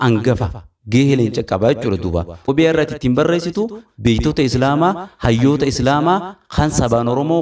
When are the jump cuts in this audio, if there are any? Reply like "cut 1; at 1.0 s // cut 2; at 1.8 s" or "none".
cut 1; at 2.4 s